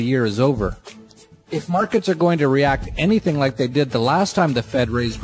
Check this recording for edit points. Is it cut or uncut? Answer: cut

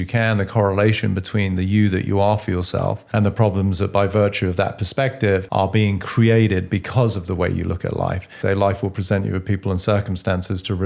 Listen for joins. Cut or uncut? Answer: cut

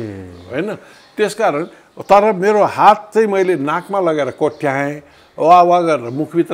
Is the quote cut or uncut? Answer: uncut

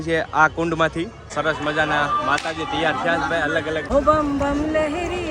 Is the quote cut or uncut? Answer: cut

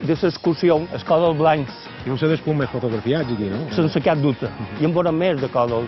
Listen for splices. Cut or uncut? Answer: cut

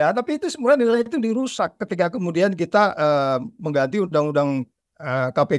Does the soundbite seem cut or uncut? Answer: uncut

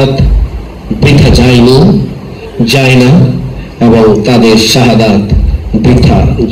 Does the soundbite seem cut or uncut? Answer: uncut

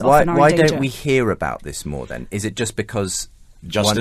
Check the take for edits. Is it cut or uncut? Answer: cut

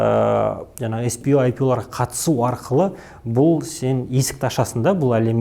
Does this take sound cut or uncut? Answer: uncut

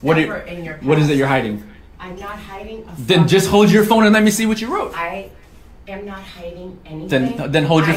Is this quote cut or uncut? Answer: uncut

